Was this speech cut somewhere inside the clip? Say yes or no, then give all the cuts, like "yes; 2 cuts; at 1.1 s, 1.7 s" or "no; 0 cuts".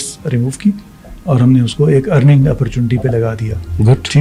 no; 0 cuts